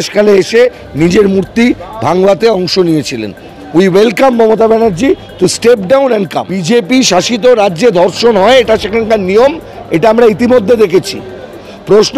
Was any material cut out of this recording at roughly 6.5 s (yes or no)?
yes